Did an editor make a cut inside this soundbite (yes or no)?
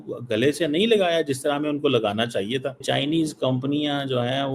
yes